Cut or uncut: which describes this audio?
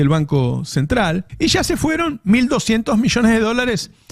cut